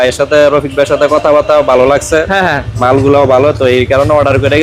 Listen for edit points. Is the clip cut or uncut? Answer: uncut